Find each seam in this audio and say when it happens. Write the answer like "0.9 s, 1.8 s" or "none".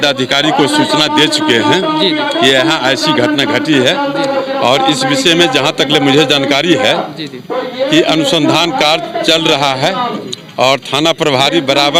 none